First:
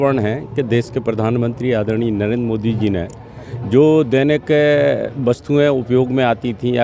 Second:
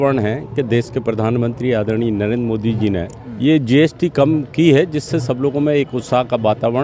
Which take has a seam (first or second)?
second